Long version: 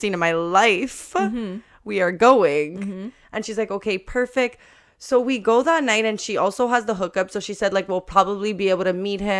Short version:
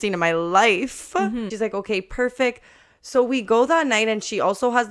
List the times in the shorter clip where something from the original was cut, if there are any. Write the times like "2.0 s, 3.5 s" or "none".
1.5 s